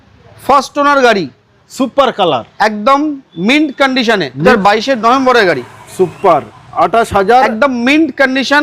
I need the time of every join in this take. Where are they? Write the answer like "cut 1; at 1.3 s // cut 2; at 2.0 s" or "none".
cut 1; at 4.4 s